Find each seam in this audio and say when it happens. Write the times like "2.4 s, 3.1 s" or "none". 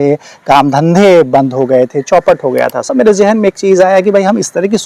2.8 s